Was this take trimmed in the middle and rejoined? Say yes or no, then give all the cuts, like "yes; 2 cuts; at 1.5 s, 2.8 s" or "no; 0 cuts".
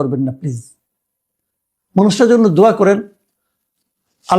no; 0 cuts